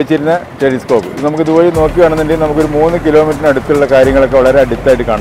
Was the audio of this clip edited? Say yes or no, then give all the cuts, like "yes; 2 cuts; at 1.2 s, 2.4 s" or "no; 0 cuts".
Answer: no; 0 cuts